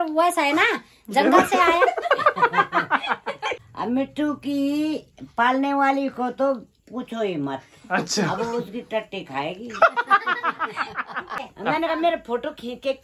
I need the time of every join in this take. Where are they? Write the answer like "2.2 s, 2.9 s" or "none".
3.6 s, 11.4 s